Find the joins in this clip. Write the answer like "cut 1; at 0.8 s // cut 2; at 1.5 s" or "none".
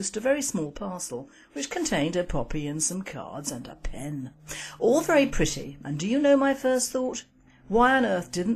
cut 1; at 1.1 s